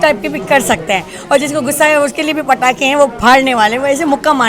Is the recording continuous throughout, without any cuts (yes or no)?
yes